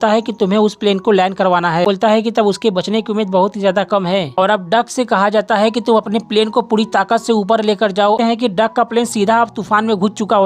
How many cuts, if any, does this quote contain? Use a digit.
3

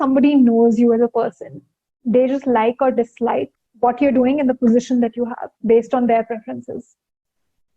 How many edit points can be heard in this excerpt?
1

